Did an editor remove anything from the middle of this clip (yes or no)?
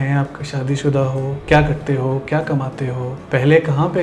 yes